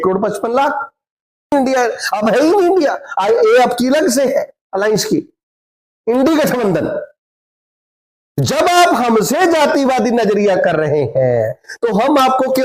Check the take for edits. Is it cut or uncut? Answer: cut